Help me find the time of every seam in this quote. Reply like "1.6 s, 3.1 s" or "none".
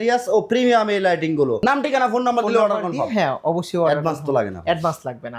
1.6 s